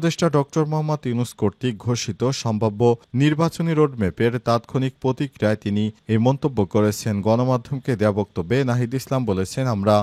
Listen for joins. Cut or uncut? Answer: uncut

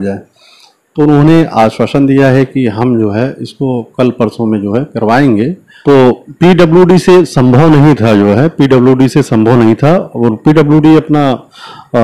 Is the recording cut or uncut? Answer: cut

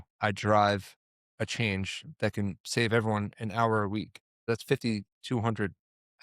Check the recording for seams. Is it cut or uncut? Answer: cut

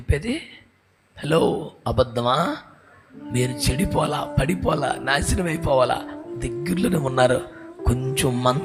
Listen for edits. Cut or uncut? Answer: uncut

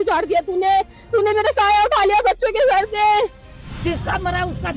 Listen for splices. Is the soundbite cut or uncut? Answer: cut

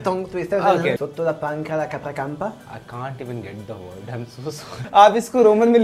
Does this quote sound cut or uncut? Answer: cut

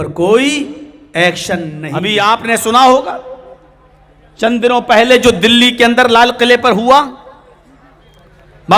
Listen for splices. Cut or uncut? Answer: cut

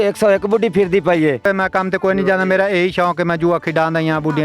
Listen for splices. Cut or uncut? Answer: cut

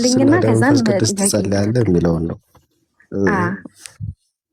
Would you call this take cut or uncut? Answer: uncut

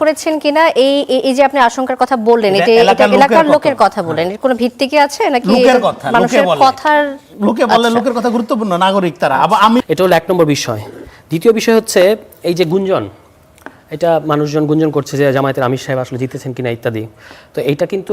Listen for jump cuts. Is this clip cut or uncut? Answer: cut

